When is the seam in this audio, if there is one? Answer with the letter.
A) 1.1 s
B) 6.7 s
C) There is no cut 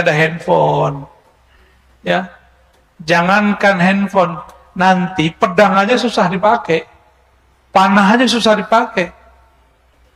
C